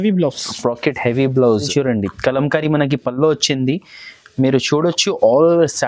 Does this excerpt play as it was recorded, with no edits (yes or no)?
no